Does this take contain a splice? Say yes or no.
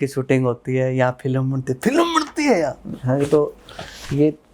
yes